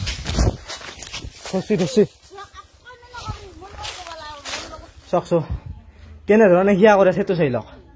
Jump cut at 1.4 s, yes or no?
no